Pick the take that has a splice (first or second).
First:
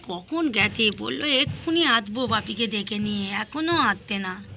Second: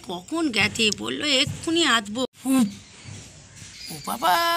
second